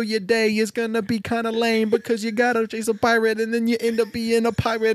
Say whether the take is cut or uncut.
uncut